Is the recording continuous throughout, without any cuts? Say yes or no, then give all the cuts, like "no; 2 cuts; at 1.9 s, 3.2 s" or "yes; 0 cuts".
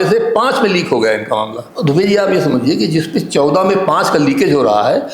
no; 1 cut; at 1.6 s